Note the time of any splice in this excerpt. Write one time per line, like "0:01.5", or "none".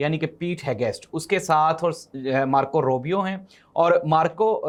none